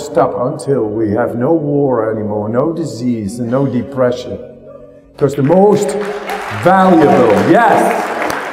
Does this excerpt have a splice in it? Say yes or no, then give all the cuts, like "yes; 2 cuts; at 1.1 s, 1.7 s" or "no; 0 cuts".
no; 0 cuts